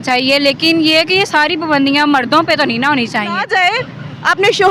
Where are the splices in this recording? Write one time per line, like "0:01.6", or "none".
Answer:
0:03.4